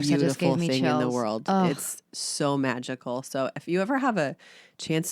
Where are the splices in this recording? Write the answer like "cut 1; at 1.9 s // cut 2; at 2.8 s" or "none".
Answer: none

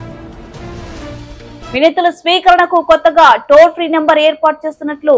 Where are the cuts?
cut 1; at 1.3 s

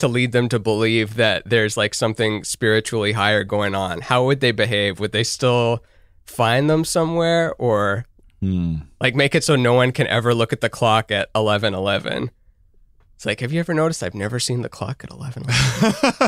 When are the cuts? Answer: cut 1; at 15.4 s

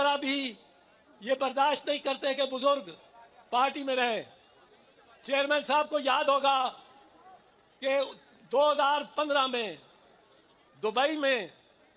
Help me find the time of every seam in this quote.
none

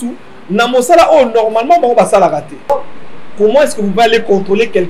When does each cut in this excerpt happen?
cut 1; at 2.7 s

